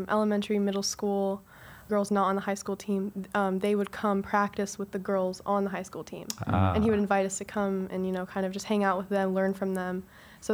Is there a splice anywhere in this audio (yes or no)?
yes